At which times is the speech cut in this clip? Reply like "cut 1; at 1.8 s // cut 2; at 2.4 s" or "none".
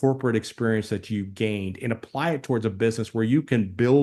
none